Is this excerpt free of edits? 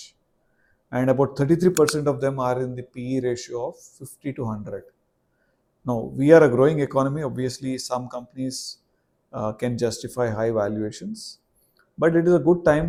yes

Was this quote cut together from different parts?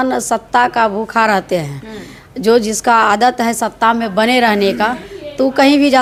no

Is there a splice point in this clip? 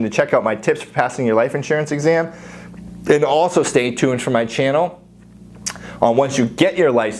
no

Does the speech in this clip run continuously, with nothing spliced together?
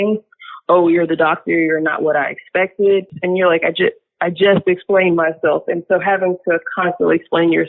no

